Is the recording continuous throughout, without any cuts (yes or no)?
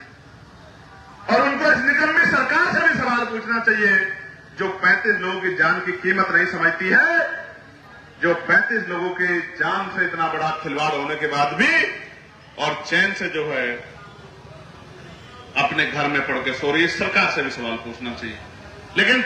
yes